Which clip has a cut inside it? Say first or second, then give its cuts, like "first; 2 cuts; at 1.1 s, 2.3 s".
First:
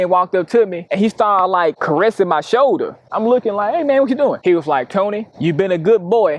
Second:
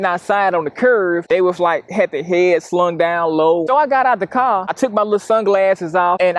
second; 1 cut; at 3.7 s